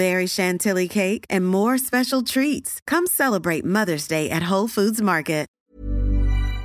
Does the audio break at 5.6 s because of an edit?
yes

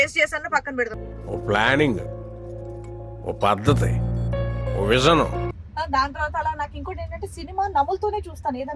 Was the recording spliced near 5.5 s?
yes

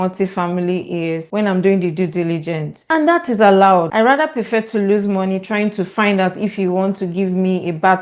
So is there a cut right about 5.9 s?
no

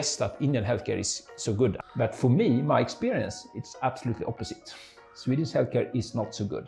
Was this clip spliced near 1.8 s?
yes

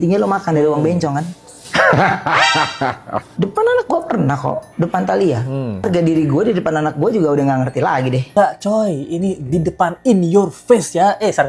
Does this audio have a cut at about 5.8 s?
yes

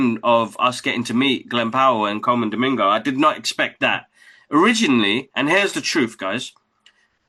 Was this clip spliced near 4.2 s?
no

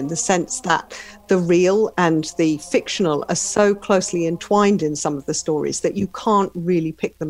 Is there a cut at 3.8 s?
no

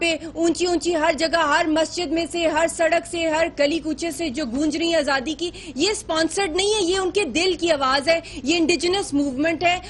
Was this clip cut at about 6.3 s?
yes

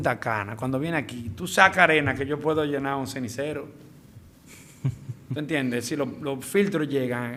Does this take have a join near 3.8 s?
no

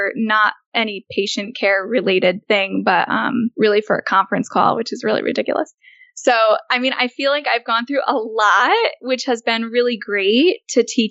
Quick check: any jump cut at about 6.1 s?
no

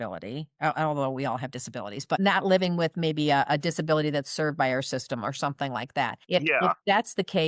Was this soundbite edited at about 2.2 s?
yes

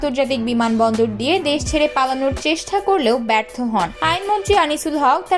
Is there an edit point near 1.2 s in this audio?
no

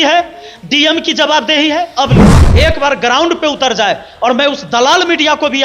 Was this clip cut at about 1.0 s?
no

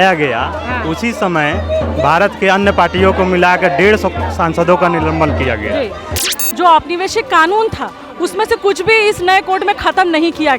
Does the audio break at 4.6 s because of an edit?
no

